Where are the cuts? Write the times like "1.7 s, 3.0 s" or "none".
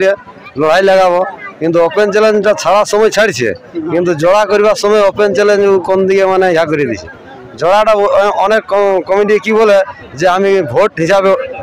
none